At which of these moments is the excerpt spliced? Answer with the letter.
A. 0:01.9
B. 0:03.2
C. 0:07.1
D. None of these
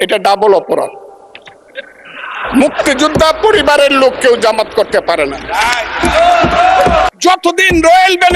C